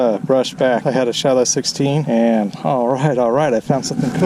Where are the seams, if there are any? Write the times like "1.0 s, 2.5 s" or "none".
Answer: 0.8 s, 2.0 s